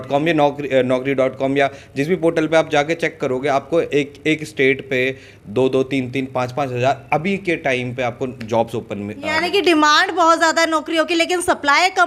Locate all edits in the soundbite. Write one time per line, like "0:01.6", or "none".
none

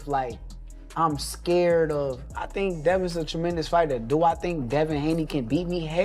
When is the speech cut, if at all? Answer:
0:04.0

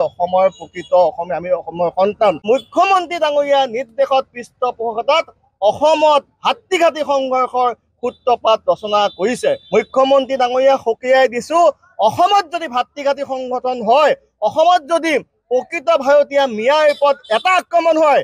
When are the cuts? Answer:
0:02.4
0:09.6

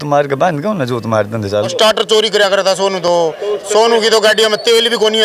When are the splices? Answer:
0:01.7

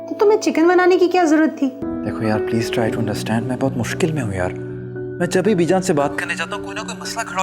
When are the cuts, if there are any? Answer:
0:01.9

